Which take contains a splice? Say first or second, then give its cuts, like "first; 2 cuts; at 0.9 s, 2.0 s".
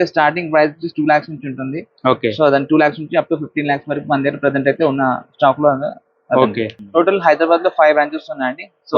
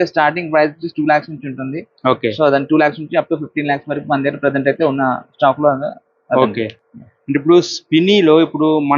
first; 1 cut; at 6.8 s